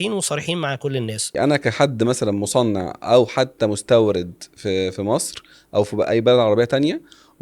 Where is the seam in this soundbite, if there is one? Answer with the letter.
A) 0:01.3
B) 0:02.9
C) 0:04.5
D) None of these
A